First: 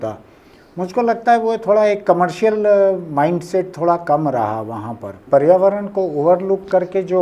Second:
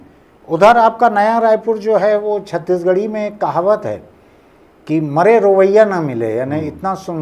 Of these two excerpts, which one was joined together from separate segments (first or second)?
first